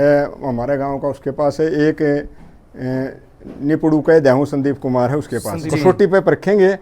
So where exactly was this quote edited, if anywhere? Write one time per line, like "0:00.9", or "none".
0:05.6